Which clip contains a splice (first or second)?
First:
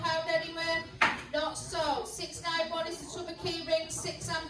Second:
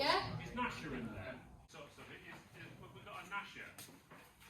second